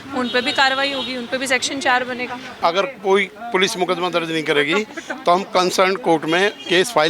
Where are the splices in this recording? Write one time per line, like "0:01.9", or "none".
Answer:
0:02.5